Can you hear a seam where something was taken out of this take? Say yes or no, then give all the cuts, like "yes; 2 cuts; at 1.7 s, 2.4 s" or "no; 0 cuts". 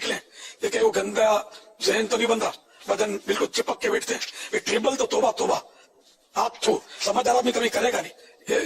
no; 0 cuts